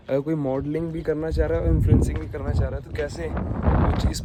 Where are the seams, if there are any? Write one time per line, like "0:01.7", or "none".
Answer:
none